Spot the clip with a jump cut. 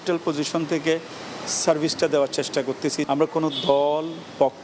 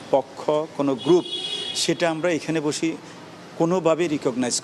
first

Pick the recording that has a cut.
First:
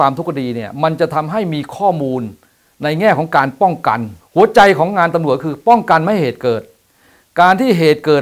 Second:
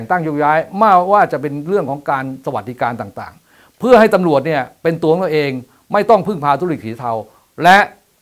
first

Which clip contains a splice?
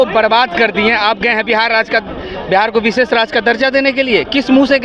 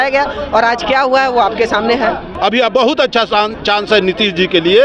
second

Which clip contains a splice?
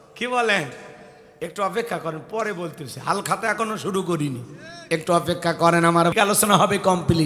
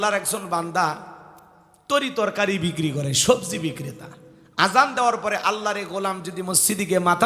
first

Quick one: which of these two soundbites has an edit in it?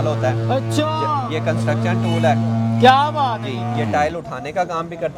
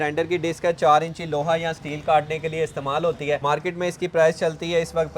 second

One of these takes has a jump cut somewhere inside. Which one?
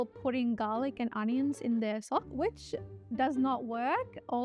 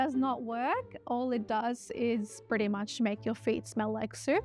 first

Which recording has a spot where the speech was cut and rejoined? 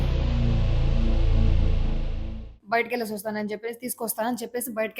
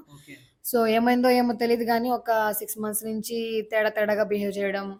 first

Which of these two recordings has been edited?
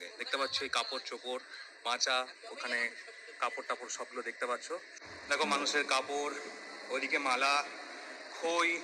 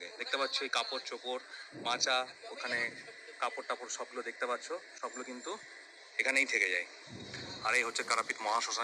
first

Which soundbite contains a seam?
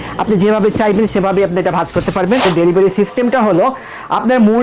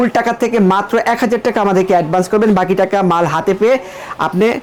first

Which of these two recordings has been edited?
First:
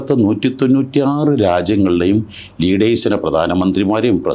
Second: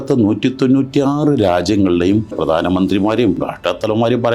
second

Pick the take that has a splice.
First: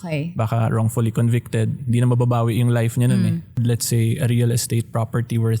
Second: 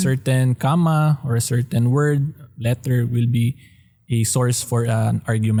first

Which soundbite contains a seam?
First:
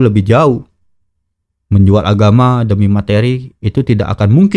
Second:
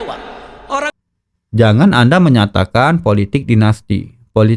second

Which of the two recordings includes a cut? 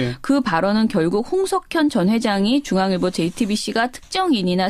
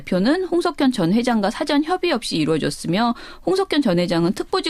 first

